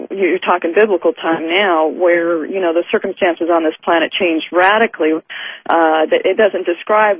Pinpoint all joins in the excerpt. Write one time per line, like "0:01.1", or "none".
0:02.7